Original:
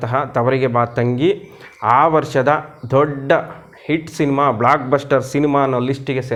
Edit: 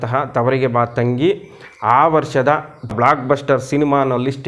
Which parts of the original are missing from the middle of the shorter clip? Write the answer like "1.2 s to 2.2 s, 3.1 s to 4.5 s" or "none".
2.9 s to 4.5 s